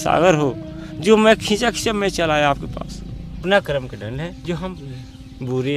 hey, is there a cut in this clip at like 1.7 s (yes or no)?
no